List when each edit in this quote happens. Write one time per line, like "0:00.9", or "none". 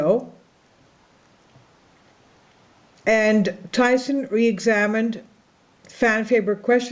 none